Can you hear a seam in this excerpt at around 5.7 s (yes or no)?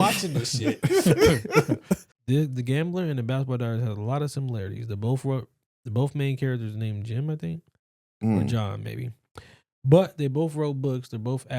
no